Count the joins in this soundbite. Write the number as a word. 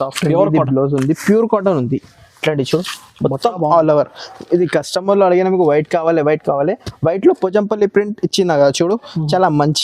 zero